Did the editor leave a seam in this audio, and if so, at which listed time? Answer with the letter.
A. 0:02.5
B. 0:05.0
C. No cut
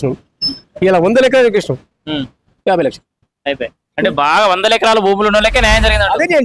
A